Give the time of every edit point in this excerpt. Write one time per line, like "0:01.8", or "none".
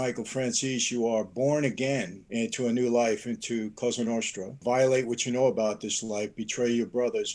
0:02.2
0:04.6